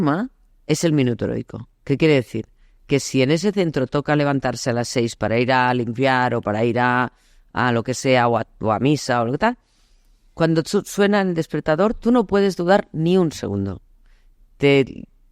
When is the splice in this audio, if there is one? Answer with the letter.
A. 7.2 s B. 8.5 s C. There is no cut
C